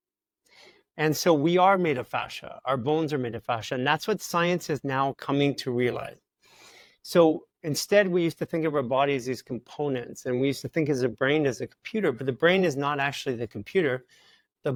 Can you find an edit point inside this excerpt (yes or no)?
no